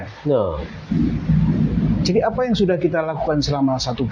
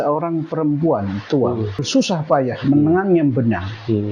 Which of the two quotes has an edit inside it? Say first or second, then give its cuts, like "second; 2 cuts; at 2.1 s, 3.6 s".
second; 1 cut; at 1.8 s